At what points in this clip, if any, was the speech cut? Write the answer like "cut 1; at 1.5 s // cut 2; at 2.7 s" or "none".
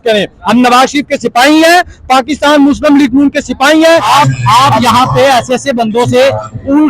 cut 1; at 4.1 s